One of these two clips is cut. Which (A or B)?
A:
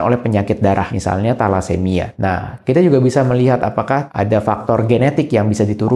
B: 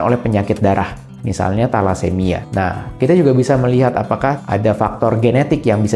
A